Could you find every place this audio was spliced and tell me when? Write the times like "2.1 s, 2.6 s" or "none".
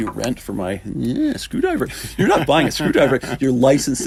none